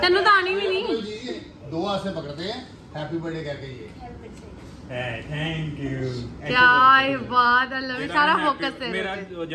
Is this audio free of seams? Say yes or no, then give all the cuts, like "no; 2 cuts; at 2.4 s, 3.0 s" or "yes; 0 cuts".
yes; 0 cuts